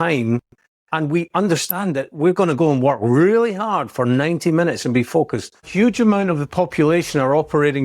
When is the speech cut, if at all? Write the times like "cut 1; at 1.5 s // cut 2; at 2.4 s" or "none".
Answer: cut 1; at 5.6 s